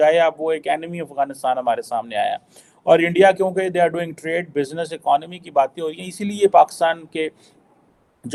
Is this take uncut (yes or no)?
yes